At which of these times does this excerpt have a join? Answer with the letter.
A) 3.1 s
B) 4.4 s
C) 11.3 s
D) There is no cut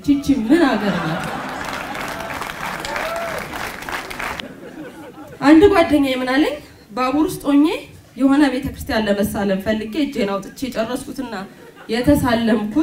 B